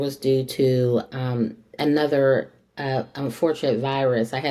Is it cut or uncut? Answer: uncut